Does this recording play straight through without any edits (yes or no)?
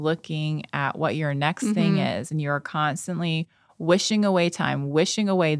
yes